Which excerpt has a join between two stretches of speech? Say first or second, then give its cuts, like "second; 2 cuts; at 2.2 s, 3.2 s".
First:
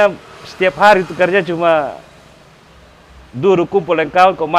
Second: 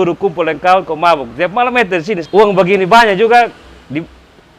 second; 1 cut; at 2.2 s